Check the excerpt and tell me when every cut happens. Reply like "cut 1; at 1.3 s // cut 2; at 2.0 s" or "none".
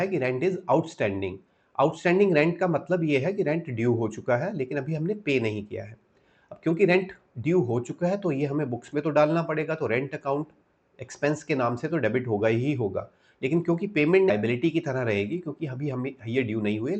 cut 1; at 14.3 s